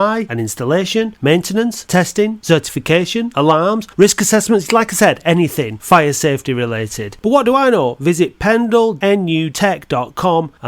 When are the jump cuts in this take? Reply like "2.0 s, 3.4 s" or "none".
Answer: 9.2 s